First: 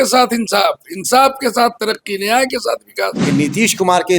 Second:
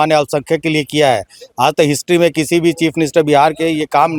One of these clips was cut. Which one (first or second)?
first